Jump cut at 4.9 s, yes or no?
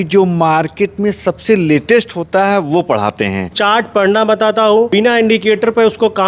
yes